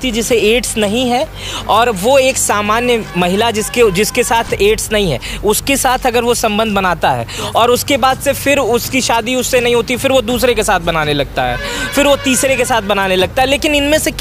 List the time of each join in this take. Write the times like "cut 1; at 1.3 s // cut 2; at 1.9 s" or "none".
none